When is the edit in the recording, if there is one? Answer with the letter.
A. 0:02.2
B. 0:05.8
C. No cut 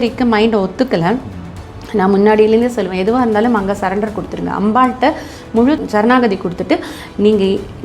B